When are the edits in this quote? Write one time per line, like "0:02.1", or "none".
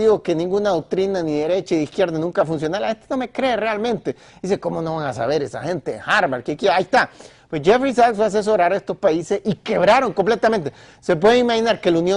0:02.7